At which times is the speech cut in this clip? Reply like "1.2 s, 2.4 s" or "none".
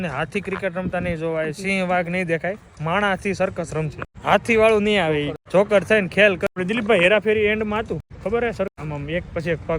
4.0 s, 5.4 s, 6.5 s, 8.1 s, 8.7 s